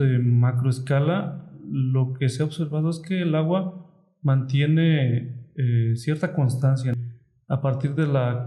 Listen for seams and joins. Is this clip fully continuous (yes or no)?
no